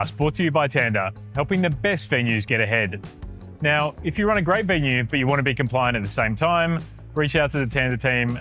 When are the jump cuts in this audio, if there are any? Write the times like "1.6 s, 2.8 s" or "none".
none